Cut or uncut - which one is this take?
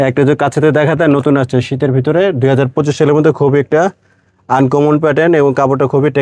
uncut